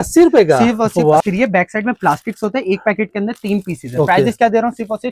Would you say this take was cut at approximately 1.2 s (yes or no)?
yes